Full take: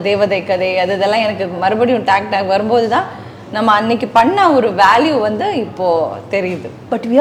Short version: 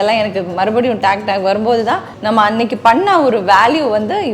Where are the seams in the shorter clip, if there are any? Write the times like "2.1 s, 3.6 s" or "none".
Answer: 2.1 s